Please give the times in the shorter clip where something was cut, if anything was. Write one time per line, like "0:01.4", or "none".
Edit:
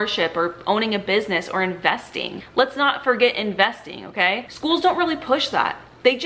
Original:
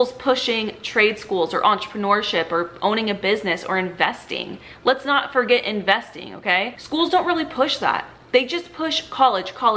0:02.4